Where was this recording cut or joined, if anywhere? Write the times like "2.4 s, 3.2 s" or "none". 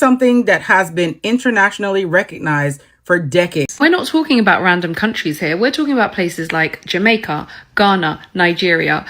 3.7 s